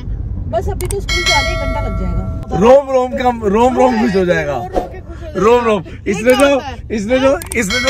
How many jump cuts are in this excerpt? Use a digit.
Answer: 1